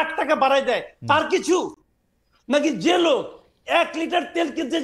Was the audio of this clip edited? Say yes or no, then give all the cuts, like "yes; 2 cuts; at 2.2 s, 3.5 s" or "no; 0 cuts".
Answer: no; 0 cuts